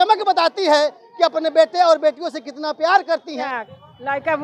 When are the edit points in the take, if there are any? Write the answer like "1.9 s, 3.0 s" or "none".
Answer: 3.4 s